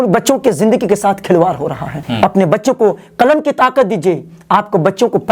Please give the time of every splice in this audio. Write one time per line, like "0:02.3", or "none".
0:02.0